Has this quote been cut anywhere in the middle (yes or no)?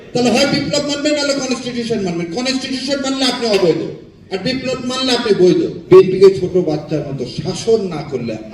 yes